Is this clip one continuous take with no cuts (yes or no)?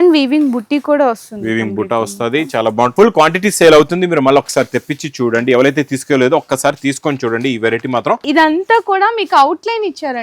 no